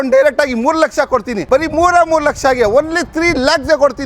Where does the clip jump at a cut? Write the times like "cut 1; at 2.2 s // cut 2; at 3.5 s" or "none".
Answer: cut 1; at 1.3 s